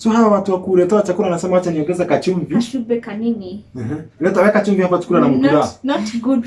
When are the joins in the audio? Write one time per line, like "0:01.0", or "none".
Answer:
none